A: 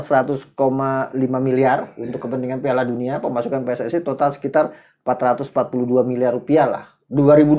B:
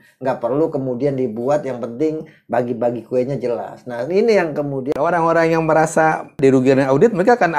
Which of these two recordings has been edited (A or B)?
B